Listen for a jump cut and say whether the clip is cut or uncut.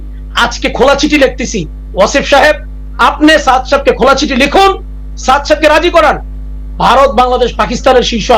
uncut